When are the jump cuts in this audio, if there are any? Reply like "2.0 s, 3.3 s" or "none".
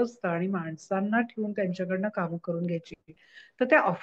none